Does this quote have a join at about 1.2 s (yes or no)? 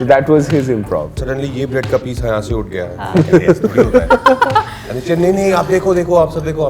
yes